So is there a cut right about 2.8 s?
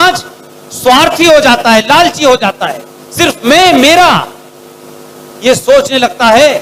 no; 0 cuts

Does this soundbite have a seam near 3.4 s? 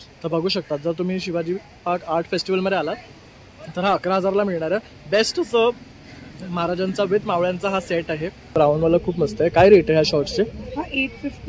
no; 1 cut; at 8.5 s

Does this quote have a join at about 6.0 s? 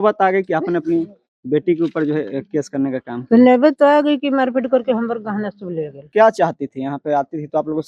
yes; 1 cut; at 6.0 s

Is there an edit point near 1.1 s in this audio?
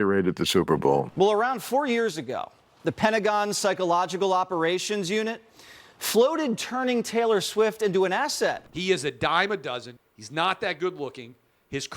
yes; 2 cuts; at 1.1 s, 8.7 s

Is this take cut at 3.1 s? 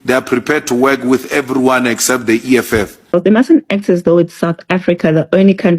yes; 1 cut; at 3.1 s

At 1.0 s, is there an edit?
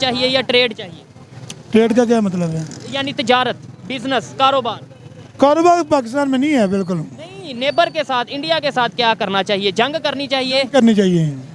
no; 0 cuts

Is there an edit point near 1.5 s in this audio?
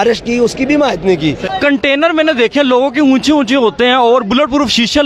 yes; 1 cut; at 1.5 s

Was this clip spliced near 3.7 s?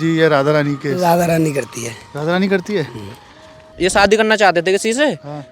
yes; 1 cut; at 3.7 s

